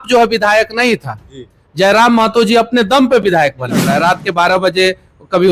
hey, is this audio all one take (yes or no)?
no